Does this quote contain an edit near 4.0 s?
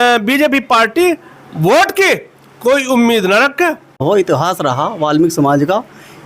yes; 1 cut; at 4.0 s

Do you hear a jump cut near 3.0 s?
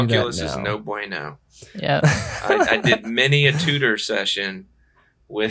yes; 1 cut; at 3.0 s

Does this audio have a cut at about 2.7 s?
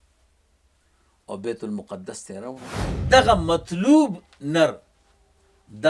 yes; 1 cut; at 2.7 s

